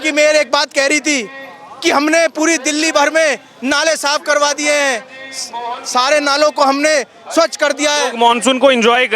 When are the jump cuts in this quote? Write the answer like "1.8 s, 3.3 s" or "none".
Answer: none